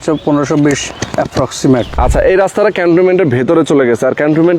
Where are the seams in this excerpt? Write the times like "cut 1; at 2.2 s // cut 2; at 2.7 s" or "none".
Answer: cut 1; at 0.9 s // cut 2; at 1.9 s